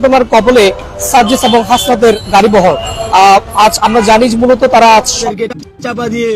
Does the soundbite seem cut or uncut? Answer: cut